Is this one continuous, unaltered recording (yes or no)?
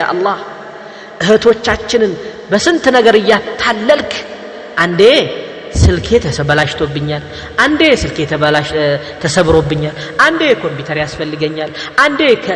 yes